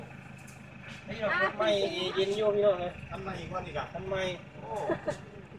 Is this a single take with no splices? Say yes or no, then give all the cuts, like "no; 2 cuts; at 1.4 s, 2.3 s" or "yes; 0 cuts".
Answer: yes; 0 cuts